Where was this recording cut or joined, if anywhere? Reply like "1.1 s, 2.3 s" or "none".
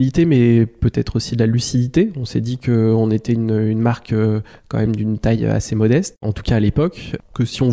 none